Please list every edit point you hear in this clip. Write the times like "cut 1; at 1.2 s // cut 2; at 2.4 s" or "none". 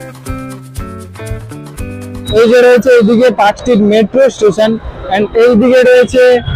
cut 1; at 2.3 s